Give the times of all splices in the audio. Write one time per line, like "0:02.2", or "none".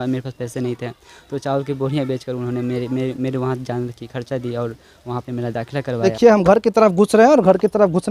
0:06.0